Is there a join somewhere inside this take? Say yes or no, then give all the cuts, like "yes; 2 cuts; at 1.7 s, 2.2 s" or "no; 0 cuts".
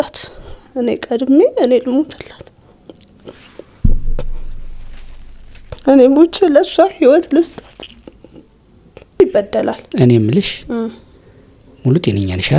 yes; 1 cut; at 9.2 s